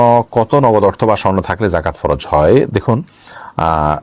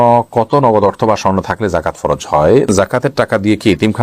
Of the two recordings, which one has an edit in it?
second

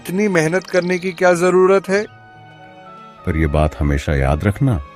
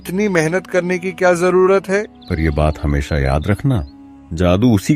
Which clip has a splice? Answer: second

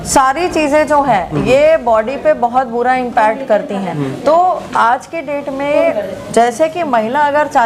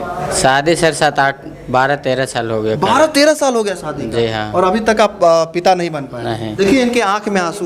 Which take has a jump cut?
second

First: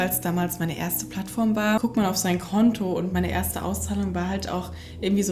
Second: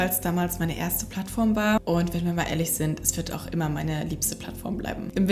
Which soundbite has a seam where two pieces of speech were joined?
first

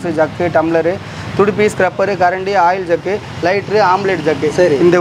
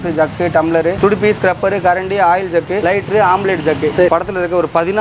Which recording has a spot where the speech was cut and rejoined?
second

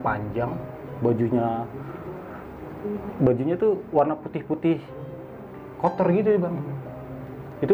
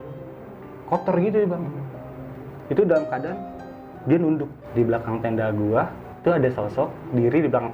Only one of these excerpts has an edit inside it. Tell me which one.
second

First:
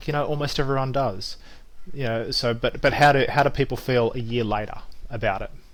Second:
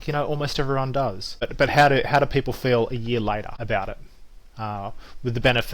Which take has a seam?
second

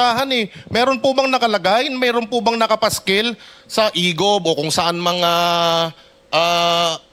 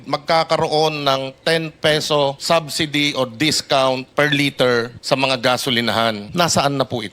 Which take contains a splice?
second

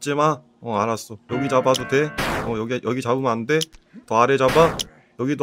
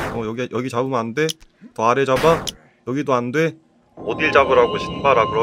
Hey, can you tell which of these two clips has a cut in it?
first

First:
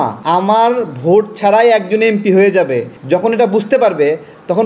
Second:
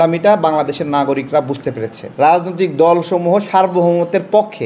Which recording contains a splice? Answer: second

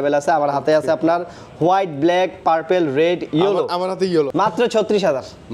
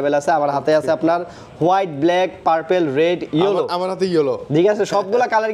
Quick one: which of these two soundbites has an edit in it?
first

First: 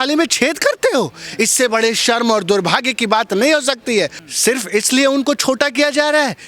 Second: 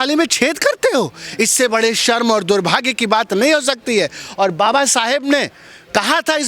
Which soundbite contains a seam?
first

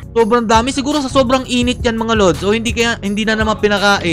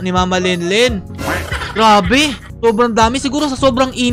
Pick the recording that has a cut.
second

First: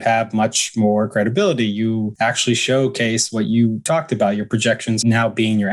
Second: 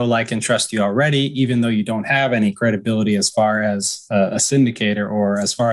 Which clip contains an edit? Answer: first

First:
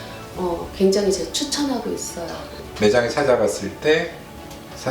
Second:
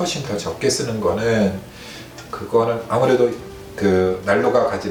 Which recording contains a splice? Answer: first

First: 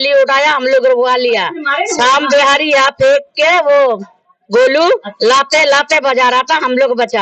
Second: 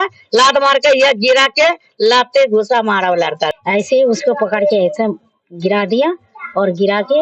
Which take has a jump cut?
second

